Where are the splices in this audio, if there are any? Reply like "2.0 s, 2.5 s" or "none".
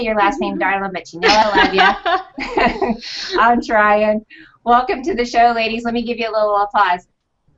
none